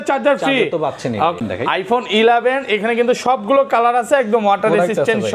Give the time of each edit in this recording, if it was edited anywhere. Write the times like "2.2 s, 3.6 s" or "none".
1.4 s